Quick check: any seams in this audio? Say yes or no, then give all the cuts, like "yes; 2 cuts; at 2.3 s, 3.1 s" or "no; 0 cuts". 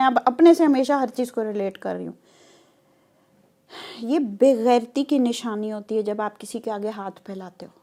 no; 0 cuts